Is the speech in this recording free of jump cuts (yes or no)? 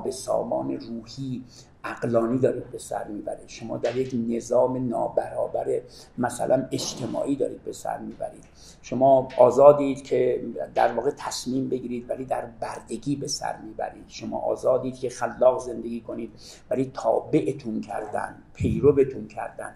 yes